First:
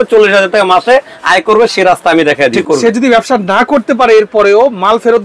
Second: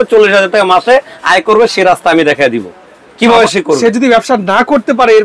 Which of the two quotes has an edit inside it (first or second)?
first